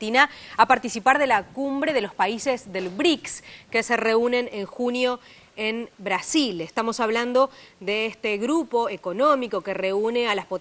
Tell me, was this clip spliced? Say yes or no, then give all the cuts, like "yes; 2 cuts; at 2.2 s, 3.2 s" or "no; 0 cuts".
no; 0 cuts